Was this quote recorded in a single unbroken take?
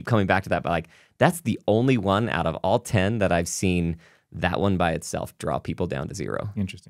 yes; 0 cuts

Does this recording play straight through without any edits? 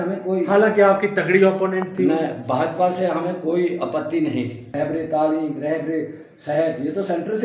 no; 1 cut; at 4.6 s

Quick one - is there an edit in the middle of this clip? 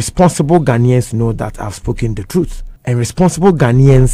yes; 1 cut; at 2.7 s

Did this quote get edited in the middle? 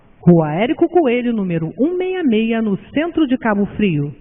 no; 0 cuts

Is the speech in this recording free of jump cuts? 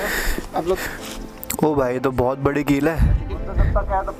yes; 0 cuts

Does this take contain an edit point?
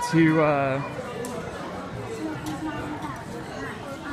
no; 0 cuts

